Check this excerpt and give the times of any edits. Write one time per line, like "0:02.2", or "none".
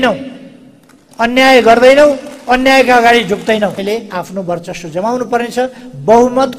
0:03.8